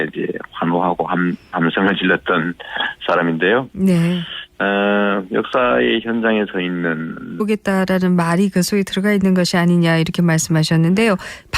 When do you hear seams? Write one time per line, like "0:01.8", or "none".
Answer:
none